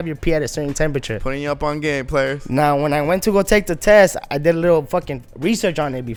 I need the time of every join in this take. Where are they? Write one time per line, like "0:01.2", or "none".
none